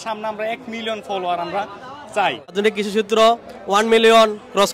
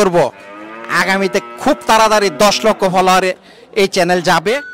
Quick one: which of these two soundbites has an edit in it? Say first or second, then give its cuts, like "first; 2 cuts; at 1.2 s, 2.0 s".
first; 1 cut; at 2.5 s